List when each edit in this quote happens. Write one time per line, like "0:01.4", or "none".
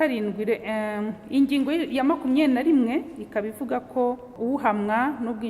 0:04.4

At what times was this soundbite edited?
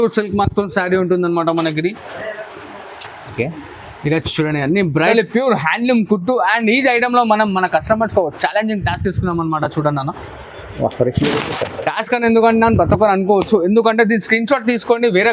0:05.1

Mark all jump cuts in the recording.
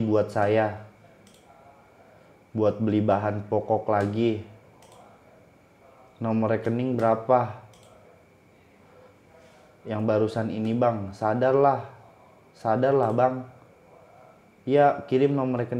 none

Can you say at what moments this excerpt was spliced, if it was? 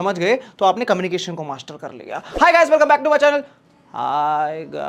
none

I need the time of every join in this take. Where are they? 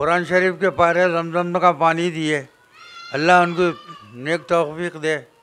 none

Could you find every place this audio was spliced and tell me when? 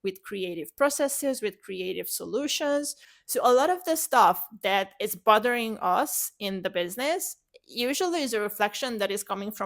0:03.0

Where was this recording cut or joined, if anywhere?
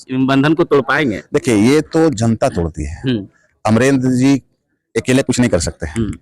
none

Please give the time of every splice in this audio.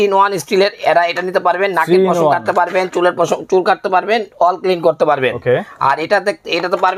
none

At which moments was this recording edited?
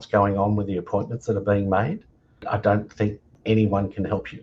0:02.4
0:03.4

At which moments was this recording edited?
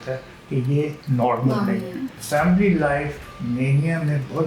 0:01.0
0:02.1

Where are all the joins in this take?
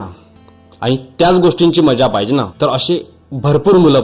0:02.5

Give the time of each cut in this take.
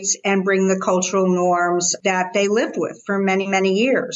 0:01.9

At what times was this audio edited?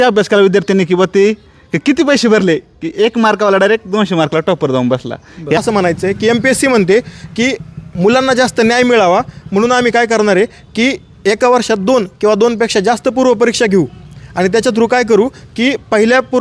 0:05.6

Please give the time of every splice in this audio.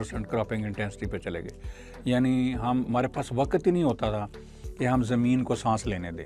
none

